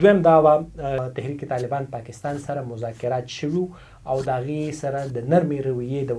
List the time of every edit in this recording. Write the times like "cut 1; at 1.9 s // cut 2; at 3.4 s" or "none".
cut 1; at 1.1 s